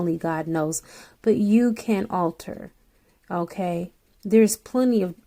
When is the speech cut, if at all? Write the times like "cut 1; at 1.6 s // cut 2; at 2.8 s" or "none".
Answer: none